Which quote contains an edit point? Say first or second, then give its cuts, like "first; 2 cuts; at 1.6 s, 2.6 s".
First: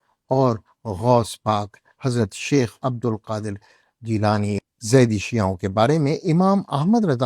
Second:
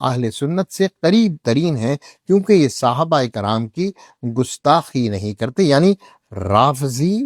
first; 1 cut; at 4.6 s